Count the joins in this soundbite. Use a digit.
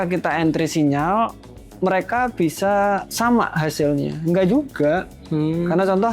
1